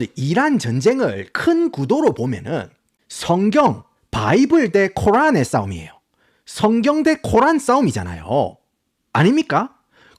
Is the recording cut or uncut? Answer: uncut